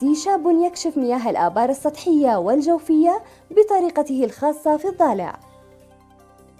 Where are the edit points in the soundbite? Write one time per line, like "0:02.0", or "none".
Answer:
0:05.4